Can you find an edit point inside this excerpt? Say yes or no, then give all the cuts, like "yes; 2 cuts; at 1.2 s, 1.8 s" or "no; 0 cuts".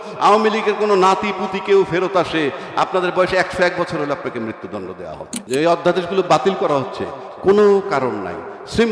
yes; 1 cut; at 5.5 s